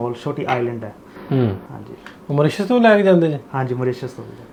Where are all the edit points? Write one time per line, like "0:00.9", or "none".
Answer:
none